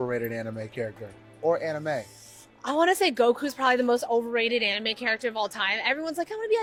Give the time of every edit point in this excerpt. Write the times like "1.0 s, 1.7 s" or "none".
none